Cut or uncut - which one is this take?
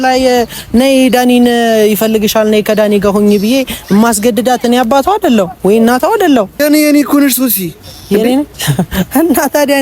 cut